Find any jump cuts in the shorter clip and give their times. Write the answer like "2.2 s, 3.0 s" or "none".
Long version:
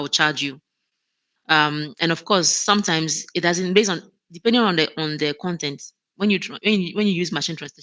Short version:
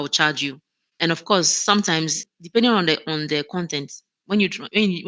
0.9 s, 2.2 s